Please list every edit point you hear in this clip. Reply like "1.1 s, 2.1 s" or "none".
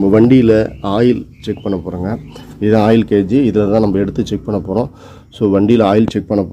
none